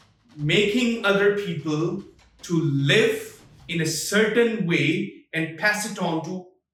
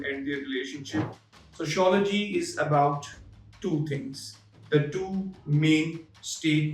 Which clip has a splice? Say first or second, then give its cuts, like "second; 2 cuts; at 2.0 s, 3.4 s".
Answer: second; 1 cut; at 1.1 s